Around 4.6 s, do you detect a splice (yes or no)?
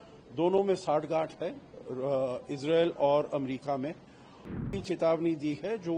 yes